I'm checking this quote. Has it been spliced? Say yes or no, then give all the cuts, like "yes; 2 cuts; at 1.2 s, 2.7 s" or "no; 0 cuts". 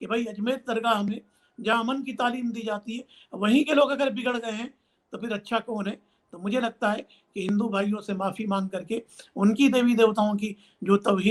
no; 0 cuts